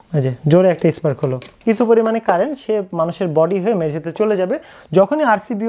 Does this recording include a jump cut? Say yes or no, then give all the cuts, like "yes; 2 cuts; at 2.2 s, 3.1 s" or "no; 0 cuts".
yes; 1 cut; at 1.5 s